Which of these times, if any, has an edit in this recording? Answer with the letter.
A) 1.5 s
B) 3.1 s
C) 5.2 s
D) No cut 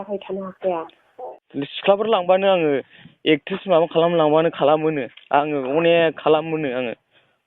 A